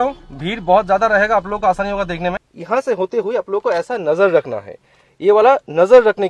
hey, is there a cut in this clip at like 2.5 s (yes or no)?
yes